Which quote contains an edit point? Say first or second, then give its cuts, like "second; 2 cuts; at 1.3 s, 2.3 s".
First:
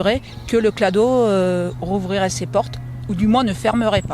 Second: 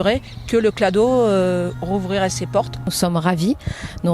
second; 1 cut; at 2.9 s